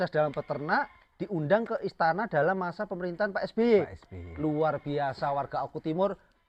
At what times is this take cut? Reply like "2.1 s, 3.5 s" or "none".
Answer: none

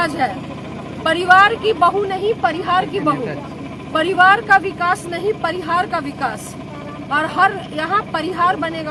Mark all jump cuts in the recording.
none

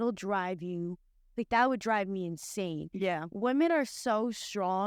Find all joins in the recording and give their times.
none

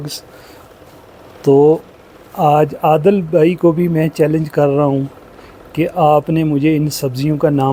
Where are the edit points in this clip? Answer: none

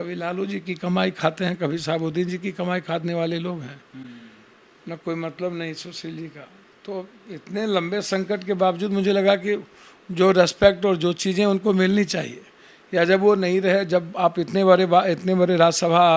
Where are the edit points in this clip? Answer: none

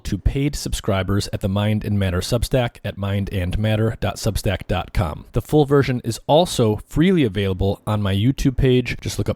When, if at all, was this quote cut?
none

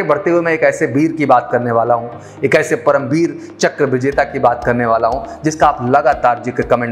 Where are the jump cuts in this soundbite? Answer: none

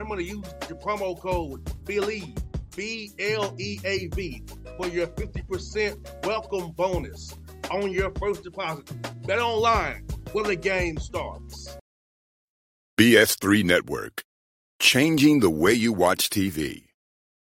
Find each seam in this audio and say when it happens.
11.7 s

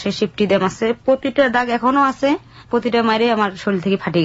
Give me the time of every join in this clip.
none

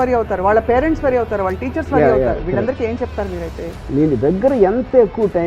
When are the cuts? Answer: 3.8 s

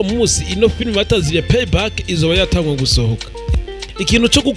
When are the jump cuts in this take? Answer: 3.4 s

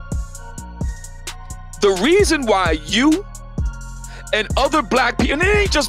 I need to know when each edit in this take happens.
1.7 s

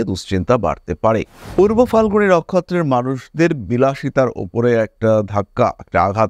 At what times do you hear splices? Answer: 1.4 s

